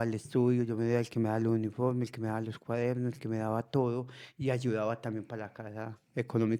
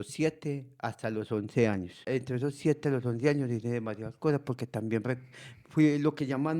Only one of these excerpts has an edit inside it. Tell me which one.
second; 1 cut; at 2.1 s

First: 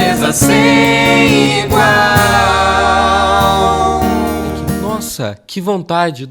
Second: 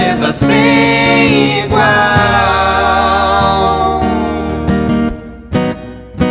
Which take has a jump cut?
first; 1 cut; at 4.8 s

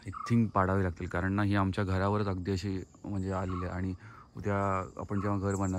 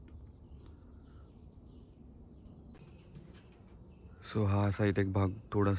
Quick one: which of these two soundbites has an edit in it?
second; 1 cut; at 2.7 s

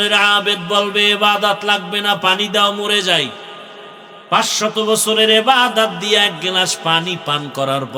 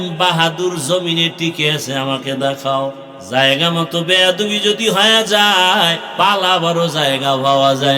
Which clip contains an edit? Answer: second; 2 cuts; at 3.1 s, 6.0 s

